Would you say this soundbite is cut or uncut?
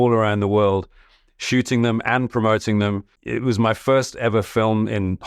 cut